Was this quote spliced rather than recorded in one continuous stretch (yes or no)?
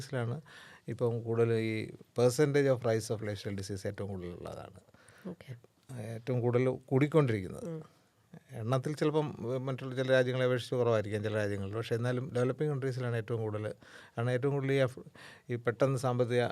no